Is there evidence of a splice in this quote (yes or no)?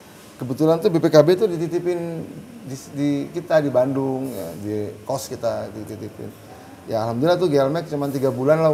no